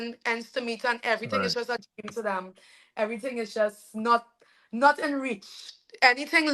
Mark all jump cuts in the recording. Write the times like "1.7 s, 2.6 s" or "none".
none